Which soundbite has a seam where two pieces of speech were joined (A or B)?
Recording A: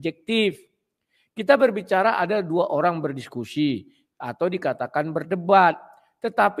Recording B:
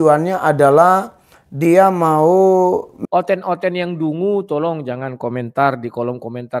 B